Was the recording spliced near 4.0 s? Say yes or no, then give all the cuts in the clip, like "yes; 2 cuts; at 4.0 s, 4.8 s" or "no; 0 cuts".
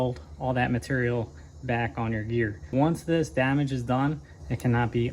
no; 1 cut; at 2.6 s